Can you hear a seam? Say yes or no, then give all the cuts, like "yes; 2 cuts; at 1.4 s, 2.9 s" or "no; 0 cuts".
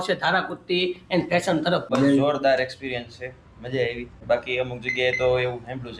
yes; 2 cuts; at 1.9 s, 4.2 s